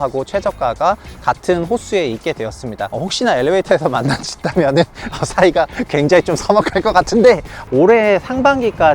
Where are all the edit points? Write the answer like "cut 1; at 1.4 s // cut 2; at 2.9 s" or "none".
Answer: cut 1; at 2.9 s // cut 2; at 7.5 s